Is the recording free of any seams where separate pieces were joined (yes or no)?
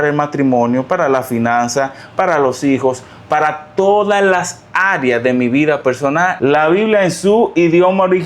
no